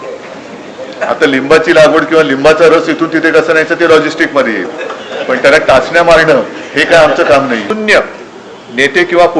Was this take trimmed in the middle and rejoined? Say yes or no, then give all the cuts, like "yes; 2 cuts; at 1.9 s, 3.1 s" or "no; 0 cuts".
yes; 1 cut; at 7.7 s